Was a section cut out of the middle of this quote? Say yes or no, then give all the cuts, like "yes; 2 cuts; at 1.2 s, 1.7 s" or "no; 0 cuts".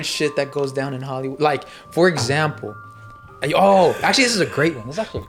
no; 0 cuts